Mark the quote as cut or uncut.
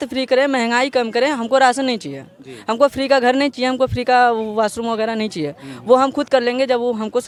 uncut